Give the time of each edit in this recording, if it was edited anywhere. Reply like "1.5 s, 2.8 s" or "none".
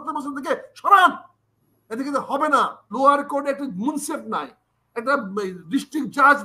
2.9 s